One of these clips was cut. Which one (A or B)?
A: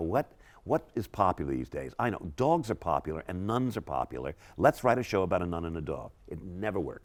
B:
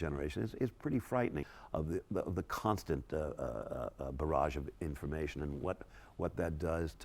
B